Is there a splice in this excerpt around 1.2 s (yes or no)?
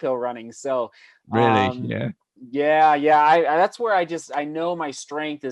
no